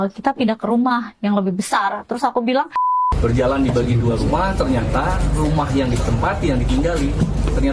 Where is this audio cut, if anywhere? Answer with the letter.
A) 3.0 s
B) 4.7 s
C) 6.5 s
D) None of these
A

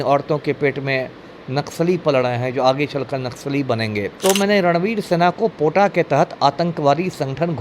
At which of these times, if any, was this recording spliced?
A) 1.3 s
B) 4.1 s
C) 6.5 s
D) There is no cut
B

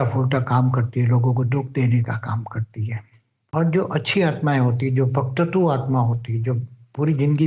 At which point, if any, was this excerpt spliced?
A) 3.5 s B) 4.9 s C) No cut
A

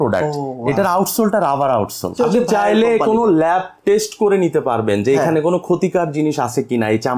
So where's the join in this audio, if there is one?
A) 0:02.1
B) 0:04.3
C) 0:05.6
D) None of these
A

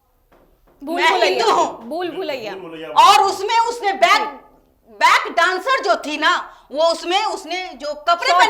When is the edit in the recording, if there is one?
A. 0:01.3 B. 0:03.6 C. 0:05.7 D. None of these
D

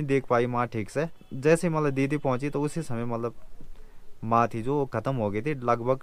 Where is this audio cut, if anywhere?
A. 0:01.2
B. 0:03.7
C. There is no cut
A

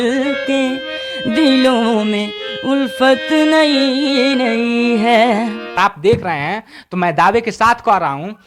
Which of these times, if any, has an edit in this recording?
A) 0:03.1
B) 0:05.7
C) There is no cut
B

